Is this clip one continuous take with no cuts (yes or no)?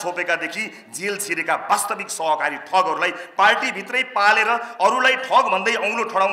yes